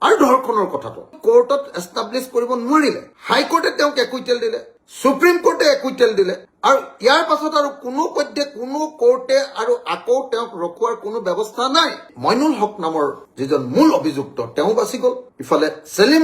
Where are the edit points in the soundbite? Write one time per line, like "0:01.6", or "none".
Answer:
0:01.1
0:12.1